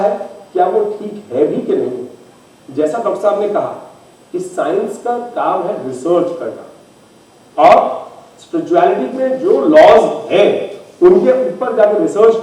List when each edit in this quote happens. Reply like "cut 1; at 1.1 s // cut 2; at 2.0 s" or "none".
none